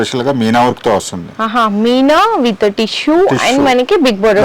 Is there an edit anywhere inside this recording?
no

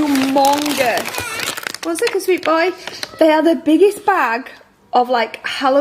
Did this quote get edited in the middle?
no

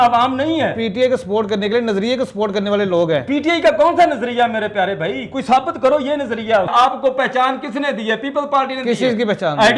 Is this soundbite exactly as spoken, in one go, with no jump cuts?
no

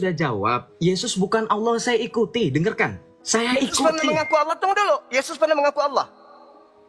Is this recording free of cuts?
yes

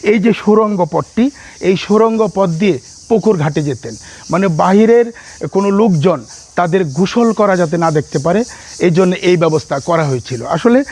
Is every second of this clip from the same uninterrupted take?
yes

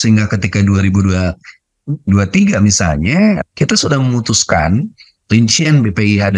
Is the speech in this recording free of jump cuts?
no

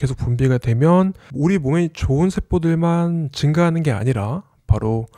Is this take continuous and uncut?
no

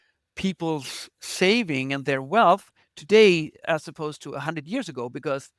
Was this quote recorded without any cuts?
yes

